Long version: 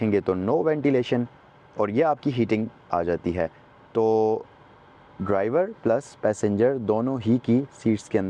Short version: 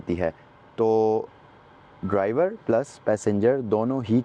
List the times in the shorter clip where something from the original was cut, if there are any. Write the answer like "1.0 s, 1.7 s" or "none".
none